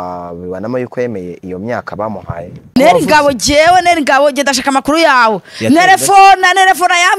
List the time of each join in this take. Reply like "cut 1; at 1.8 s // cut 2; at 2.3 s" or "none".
cut 1; at 2.7 s